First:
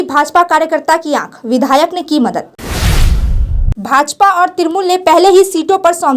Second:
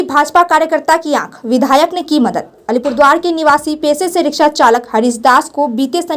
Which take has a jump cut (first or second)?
first